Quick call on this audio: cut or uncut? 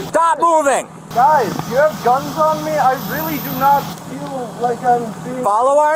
uncut